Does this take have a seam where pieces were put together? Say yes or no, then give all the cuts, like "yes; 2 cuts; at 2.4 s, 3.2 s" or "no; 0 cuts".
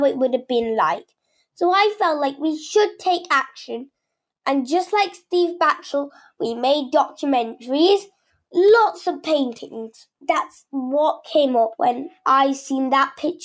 yes; 2 cuts; at 10.1 s, 11.7 s